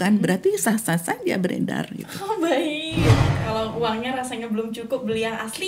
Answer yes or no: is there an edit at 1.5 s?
no